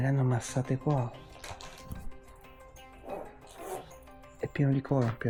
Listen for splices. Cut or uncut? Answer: uncut